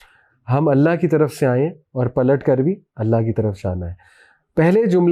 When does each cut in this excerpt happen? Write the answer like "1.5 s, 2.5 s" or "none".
none